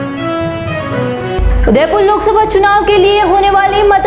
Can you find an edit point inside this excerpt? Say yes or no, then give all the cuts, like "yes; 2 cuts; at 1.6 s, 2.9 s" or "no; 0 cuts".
yes; 1 cut; at 1.3 s